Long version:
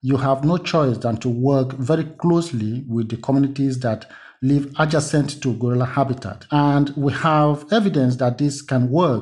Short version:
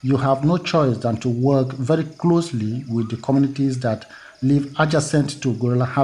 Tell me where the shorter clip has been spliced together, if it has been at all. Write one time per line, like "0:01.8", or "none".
none